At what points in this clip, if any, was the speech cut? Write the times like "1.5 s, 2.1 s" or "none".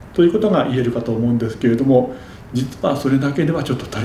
none